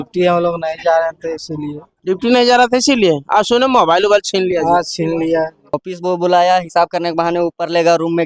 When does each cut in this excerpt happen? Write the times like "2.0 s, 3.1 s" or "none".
5.7 s